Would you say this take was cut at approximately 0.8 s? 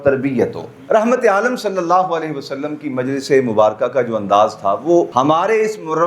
yes; 2 cuts; at 0.8 s, 5.1 s

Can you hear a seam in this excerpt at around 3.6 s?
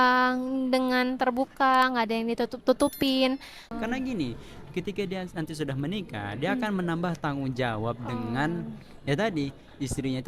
yes; 1 cut; at 3.6 s

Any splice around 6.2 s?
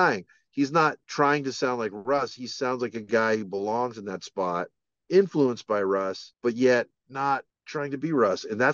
yes; 3 cuts; at 1.0 s, 6.2 s, 7.6 s

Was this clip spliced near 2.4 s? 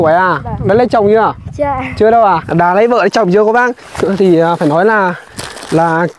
yes; 1 cut; at 2.4 s

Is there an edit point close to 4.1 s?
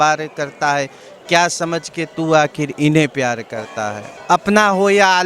yes; 1 cut; at 4.1 s

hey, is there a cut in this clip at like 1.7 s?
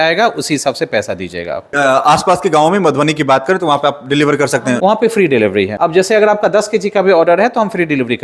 yes; 3 cuts; at 1.7 s, 4.8 s, 5.7 s

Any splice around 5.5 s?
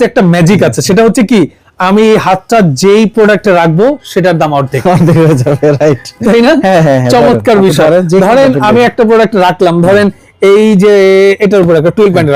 no; 0 cuts

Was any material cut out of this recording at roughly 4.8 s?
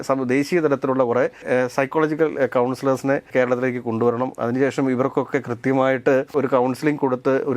no; 3 cuts; at 1.4 s, 3.3 s, 6.3 s

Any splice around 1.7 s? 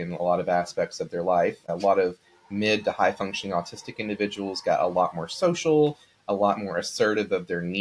yes; 1 cut; at 1.7 s

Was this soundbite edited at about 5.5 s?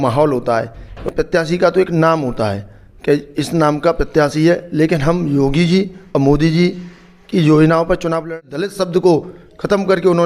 no; 2 cuts; at 1.0 s, 8.3 s

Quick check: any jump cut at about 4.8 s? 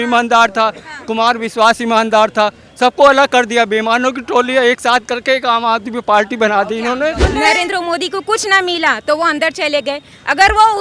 no; 1 cut; at 7.2 s

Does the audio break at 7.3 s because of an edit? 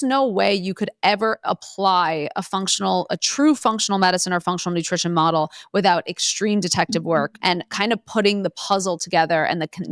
yes; 1 cut; at 7.3 s

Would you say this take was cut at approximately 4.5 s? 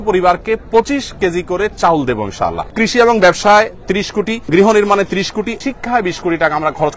yes; 3 cuts; at 2.7 s, 4.5 s, 5.5 s

